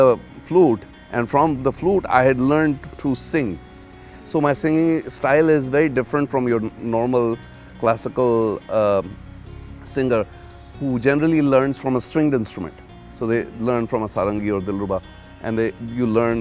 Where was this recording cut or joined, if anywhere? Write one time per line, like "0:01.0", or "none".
none